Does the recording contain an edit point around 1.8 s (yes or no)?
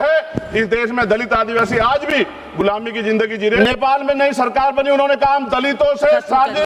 no